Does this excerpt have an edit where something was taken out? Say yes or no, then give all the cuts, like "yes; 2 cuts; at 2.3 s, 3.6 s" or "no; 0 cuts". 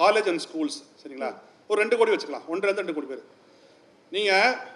no; 0 cuts